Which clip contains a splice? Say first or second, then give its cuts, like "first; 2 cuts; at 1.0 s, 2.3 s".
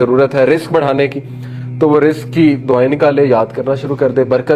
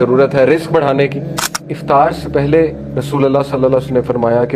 second; 1 cut; at 1.6 s